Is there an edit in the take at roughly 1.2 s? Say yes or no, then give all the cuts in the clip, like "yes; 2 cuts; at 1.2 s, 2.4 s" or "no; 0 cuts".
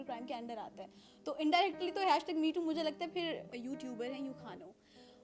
no; 1 cut; at 3.5 s